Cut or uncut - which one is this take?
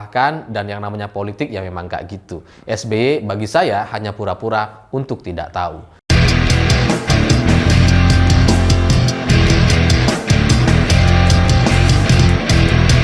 cut